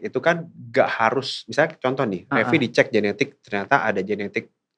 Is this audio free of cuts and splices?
yes; 0 cuts

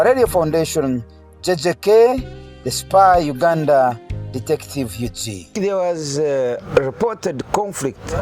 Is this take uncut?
no; 1 cut; at 5.5 s

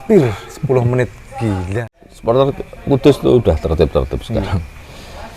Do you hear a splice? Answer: yes; 1 cut; at 1.7 s

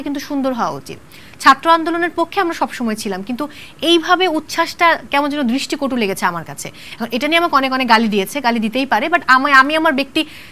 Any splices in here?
no; 0 cuts

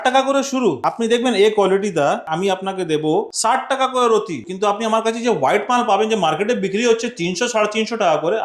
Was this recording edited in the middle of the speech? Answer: yes; 4 cuts; at 0.9 s, 2.3 s, 3.3 s, 4.5 s

